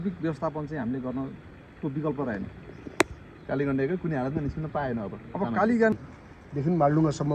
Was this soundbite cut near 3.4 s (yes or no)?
no